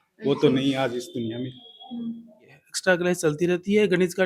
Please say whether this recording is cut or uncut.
cut